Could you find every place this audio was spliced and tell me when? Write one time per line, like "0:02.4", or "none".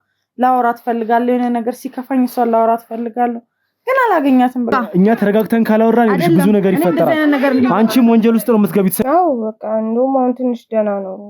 0:04.8
0:09.0